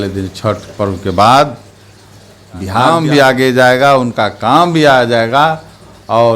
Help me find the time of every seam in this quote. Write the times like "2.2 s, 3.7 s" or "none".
2.9 s